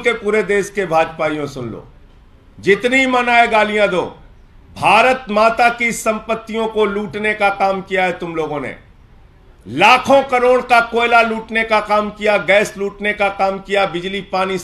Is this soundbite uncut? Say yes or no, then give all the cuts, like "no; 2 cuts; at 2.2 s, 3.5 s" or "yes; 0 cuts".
yes; 0 cuts